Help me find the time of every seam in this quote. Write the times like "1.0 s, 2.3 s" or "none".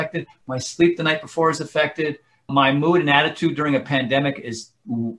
none